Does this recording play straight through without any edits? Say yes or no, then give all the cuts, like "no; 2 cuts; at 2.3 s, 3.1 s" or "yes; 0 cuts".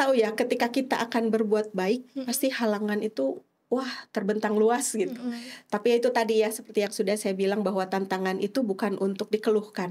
yes; 0 cuts